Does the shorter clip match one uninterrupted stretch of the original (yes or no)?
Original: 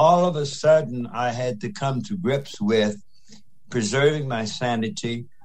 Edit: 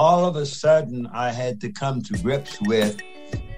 yes